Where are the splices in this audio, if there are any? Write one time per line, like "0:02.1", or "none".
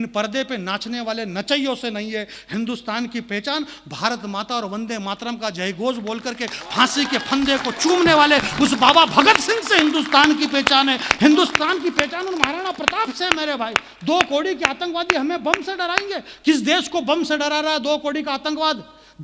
none